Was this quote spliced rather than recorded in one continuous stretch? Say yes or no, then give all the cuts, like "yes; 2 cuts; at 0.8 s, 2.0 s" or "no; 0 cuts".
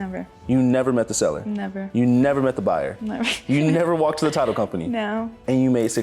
no; 0 cuts